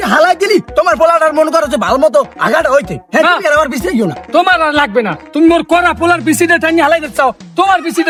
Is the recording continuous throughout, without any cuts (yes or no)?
yes